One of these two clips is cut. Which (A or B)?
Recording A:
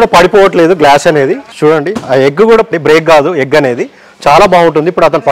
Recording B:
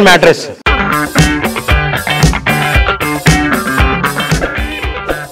A